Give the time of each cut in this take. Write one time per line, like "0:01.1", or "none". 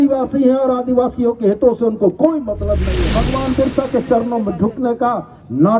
0:03.1